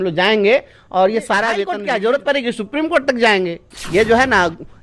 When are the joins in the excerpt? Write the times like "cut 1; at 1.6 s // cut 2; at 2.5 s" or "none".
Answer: cut 1; at 1.7 s // cut 2; at 3.7 s